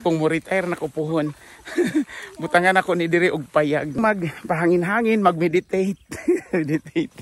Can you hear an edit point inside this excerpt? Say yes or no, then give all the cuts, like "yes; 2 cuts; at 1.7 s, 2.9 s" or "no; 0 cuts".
yes; 1 cut; at 4.0 s